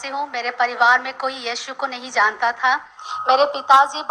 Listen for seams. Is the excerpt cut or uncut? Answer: uncut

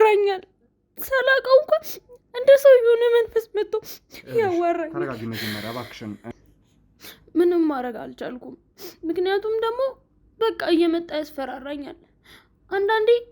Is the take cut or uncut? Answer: cut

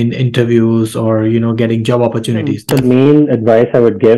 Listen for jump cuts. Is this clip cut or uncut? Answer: cut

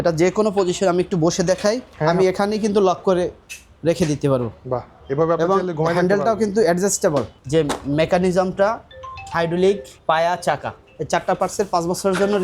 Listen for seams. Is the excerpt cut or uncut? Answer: cut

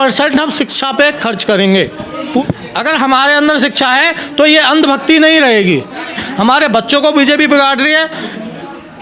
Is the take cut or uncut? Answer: cut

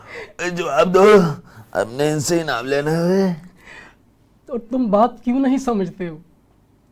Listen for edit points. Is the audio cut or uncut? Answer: uncut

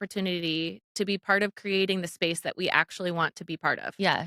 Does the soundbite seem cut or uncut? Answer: uncut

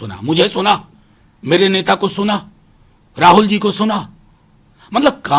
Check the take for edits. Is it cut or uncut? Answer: uncut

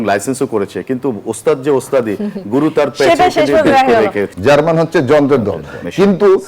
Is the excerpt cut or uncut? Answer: cut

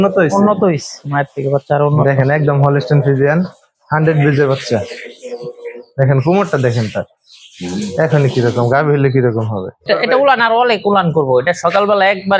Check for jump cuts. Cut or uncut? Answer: cut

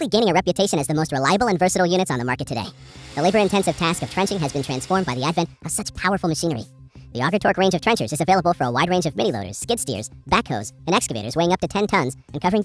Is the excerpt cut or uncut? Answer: uncut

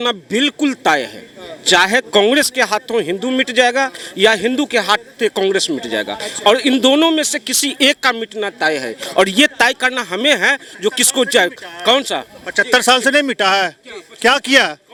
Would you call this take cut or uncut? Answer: uncut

